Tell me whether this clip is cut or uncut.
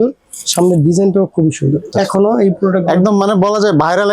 cut